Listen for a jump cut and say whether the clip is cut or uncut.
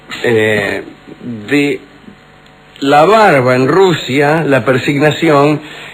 uncut